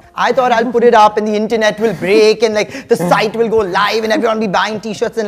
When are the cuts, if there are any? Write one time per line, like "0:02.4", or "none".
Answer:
none